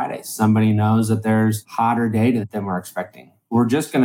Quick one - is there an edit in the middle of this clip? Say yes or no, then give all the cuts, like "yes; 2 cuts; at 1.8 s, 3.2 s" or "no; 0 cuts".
yes; 2 cuts; at 1.6 s, 2.5 s